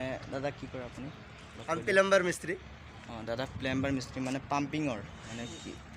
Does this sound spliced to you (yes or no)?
no